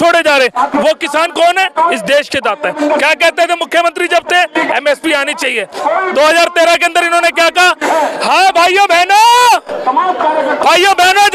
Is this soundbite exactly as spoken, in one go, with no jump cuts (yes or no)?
yes